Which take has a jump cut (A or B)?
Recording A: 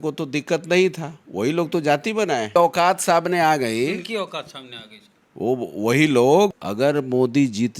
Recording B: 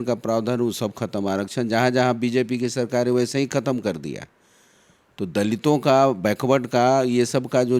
A